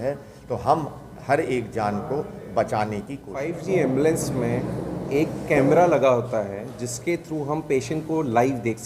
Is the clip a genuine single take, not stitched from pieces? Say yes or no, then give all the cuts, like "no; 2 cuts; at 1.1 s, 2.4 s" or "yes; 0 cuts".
no; 1 cut; at 3.5 s